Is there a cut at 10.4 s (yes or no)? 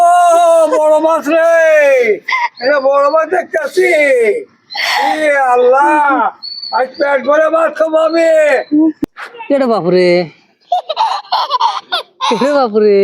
no